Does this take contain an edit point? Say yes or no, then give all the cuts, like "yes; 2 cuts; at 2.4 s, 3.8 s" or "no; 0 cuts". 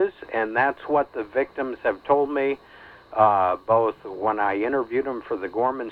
no; 0 cuts